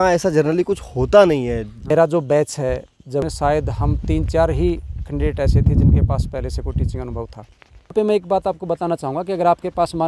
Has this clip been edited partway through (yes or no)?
yes